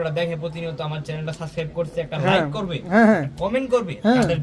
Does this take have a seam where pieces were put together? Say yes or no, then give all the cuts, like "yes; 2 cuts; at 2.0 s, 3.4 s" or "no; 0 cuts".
no; 0 cuts